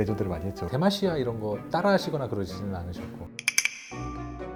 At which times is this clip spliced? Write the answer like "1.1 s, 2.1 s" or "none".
none